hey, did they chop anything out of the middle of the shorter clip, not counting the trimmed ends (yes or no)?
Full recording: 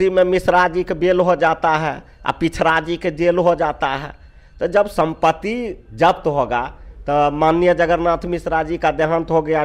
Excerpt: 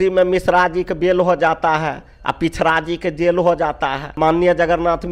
yes